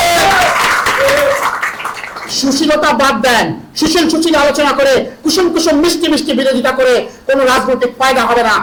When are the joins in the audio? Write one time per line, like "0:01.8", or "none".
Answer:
none

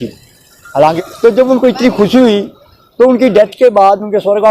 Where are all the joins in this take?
0:01.0

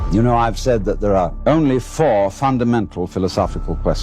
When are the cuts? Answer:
0:01.4

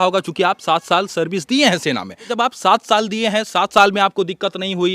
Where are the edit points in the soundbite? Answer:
0:02.3

